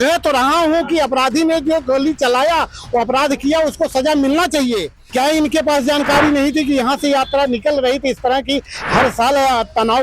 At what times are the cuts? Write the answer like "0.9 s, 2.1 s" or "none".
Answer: 5.0 s